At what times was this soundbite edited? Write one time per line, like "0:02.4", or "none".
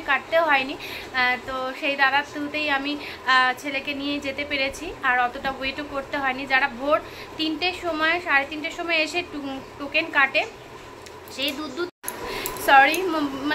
0:11.9